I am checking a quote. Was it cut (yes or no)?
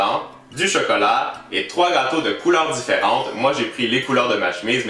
yes